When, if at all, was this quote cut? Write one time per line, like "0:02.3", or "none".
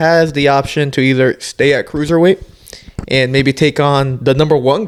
none